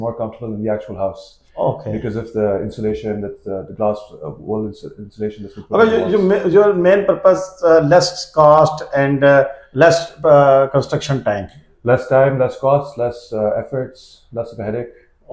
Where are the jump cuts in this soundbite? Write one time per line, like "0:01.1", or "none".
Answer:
none